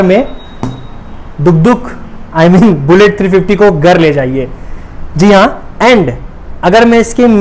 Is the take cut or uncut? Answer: uncut